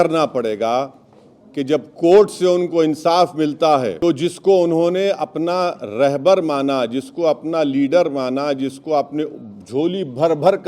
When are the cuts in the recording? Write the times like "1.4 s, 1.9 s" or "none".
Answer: 4.0 s